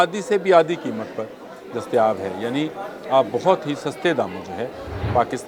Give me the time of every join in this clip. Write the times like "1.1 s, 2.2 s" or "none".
none

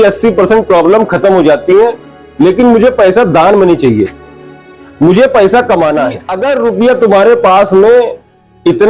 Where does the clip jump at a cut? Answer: 6.3 s

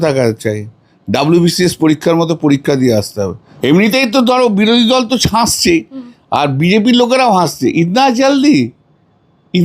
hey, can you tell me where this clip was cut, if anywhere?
3.4 s

